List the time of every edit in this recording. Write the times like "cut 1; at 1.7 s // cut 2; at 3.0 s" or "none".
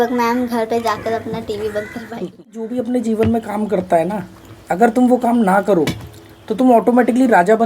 cut 1; at 2.7 s